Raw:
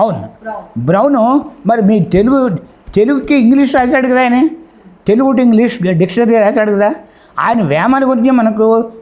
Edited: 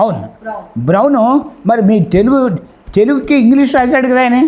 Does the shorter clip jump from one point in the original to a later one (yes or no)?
no